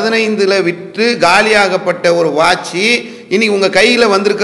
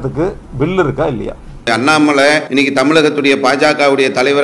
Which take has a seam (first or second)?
second